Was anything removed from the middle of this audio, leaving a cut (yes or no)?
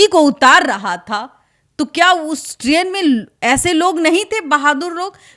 no